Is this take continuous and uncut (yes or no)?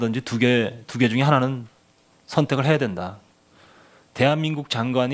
yes